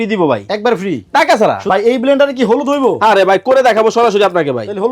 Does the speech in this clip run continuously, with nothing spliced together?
no; 1 cut; at 1.6 s

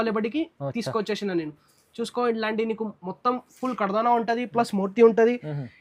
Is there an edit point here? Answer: no; 0 cuts

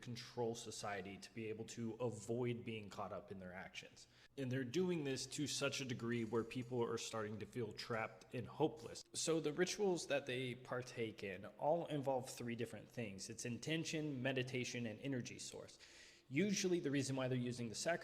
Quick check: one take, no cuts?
yes; 0 cuts

